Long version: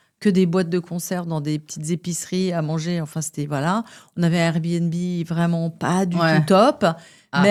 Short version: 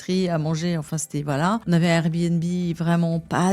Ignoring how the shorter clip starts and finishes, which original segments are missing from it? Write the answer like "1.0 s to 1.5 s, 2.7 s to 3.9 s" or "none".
3.9 s to 4.1 s